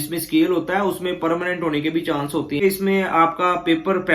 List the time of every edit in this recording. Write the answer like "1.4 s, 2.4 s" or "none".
2.6 s